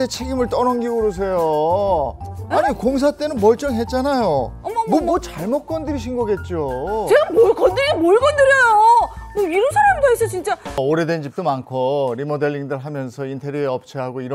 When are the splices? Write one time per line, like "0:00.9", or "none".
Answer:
0:10.8